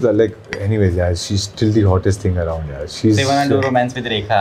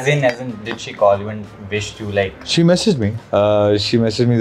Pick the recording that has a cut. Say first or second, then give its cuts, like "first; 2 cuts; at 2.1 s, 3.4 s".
second; 1 cut; at 3.2 s